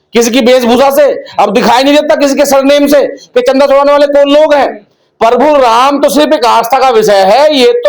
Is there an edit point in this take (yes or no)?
no